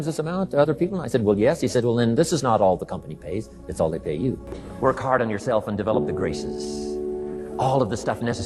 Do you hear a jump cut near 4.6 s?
yes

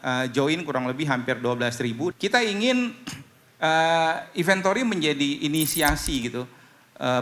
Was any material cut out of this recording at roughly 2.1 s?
yes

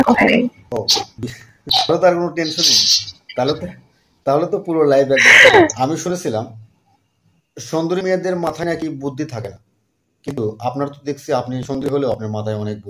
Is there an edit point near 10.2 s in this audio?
no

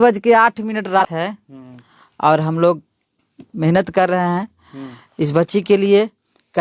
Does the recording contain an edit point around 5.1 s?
no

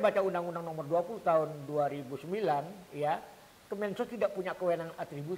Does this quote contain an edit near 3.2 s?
no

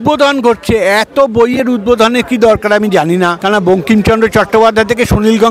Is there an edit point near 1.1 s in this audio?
no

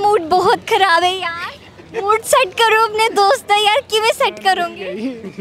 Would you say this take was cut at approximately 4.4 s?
no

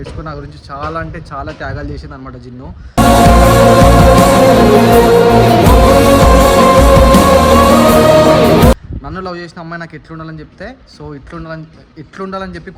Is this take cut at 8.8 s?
no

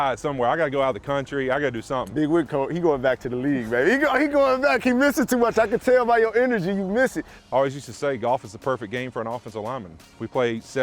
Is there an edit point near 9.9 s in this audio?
no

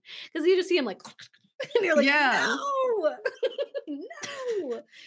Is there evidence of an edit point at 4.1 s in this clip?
no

